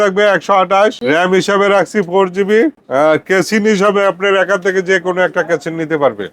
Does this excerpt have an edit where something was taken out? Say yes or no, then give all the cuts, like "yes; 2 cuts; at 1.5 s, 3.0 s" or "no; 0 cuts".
yes; 2 cuts; at 1.0 s, 2.8 s